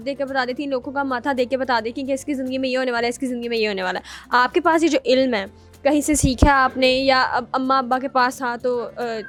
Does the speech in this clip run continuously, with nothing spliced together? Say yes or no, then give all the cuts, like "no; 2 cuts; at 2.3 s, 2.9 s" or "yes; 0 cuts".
yes; 0 cuts